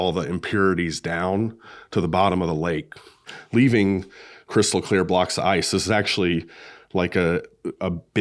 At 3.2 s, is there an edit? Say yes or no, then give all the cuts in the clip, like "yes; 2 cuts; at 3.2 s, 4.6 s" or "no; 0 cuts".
yes; 1 cut; at 3.2 s